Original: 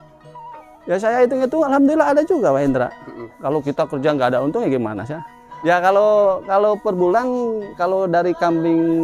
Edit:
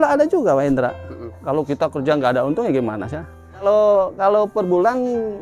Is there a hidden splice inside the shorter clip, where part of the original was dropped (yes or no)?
yes